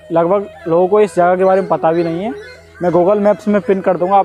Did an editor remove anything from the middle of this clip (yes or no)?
no